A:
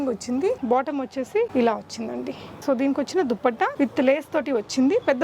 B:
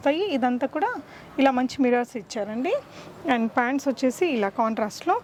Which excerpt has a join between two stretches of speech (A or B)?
A